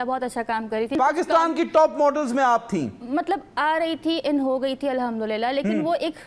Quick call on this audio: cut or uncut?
cut